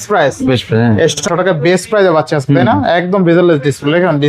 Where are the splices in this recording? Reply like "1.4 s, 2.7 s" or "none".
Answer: 1.2 s